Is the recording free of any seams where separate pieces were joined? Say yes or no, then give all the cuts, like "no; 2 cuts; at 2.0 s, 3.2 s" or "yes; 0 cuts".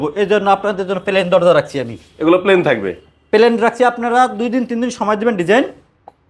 yes; 0 cuts